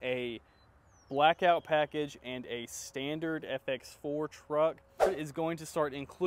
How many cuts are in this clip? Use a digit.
1